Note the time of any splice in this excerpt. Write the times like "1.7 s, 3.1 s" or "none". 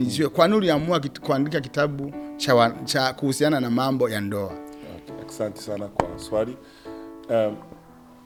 none